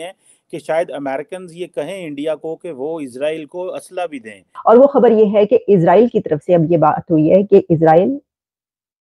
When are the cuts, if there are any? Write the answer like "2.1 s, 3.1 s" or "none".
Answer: 4.5 s

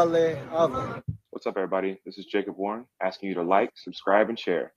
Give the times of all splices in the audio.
1.0 s

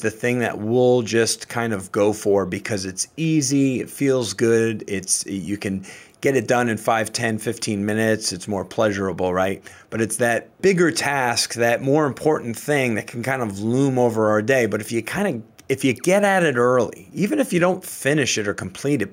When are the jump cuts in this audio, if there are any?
10.6 s

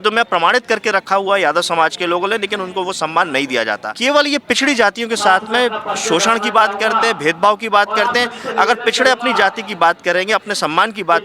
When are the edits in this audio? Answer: 3.9 s

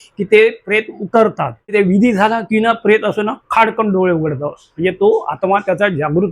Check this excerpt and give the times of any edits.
1.7 s

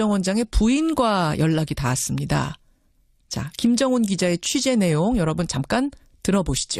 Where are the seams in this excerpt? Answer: none

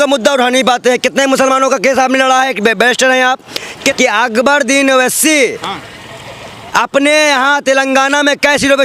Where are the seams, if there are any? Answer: 3.9 s

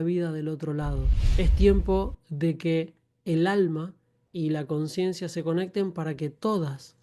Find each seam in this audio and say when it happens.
1.2 s

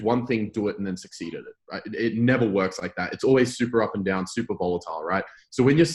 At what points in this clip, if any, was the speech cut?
none

